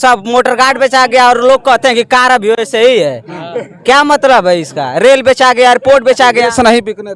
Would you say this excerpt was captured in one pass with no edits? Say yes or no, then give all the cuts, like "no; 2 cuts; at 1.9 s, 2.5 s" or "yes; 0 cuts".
yes; 0 cuts